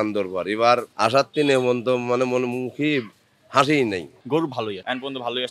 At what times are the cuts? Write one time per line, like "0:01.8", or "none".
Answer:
0:00.9
0:04.2